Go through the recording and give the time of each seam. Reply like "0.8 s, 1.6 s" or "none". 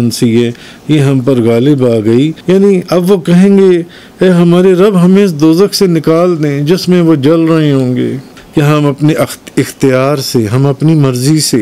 2.4 s, 8.4 s